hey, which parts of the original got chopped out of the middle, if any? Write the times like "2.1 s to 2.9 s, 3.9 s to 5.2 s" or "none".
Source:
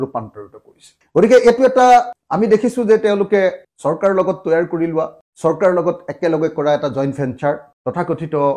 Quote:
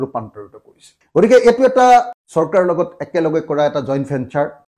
2.2 s to 5.3 s

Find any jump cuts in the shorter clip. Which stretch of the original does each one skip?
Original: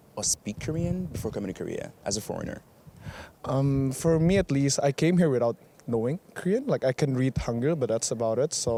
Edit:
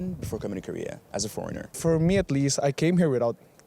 2.7 s to 4.0 s

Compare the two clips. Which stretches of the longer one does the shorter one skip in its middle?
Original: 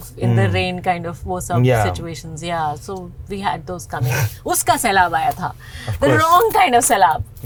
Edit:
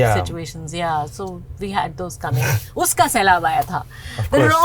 none

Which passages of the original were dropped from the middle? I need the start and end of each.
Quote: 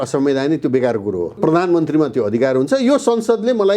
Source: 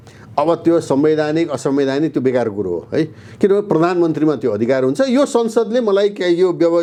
2.9 s to 3.7 s

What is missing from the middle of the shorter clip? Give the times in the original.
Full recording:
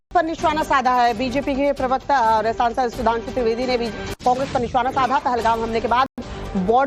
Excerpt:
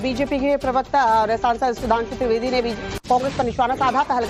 none

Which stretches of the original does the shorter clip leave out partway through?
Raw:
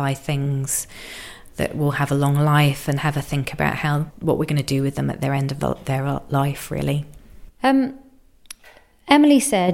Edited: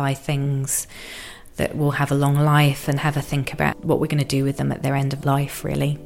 3.8 s to 4.2 s, 5.5 s to 6.2 s

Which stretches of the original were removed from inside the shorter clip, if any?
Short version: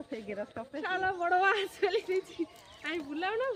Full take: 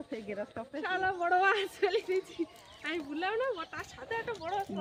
none

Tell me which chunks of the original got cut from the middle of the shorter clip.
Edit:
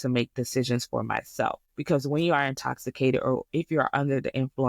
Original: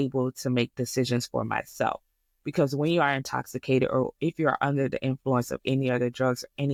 2.1 s to 2.4 s

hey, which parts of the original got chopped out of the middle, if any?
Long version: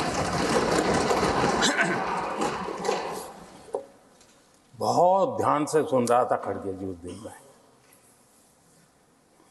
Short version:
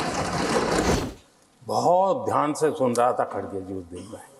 0.9 s to 4.1 s

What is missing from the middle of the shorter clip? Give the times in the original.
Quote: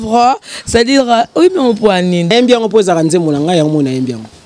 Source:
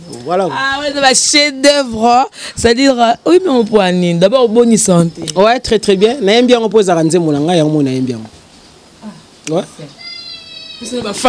4.2 s to 6.3 s

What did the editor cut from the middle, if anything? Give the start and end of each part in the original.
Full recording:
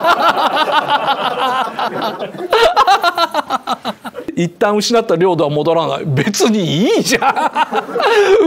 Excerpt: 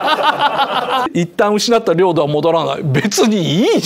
1.5 s to 4.3 s

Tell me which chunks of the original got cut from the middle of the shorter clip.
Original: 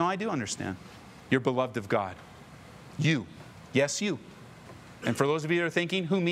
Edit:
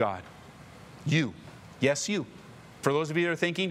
4.7 s to 5.2 s

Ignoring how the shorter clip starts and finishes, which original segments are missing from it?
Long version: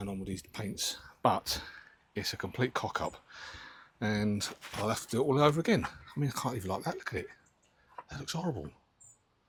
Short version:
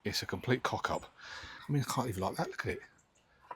3.6 s to 6.0 s

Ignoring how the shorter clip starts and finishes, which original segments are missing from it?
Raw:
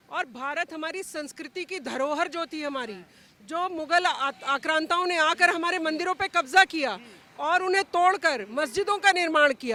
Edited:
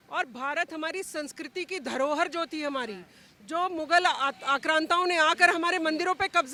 none

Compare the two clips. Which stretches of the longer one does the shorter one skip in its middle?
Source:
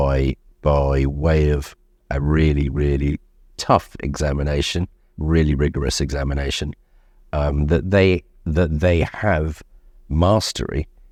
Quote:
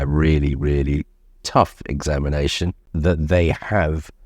5.0 s to 8.4 s

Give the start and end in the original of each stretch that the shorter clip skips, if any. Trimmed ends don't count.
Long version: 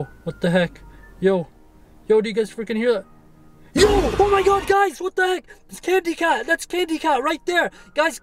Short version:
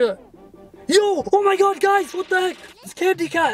none

